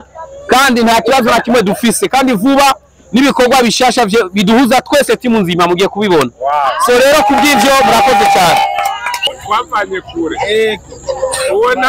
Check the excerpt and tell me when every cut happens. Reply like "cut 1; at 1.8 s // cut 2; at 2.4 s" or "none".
cut 1; at 9.4 s